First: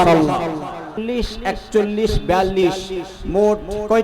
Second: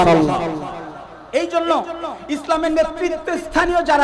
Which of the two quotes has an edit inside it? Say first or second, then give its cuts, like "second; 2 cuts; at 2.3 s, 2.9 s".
first; 1 cut; at 1.0 s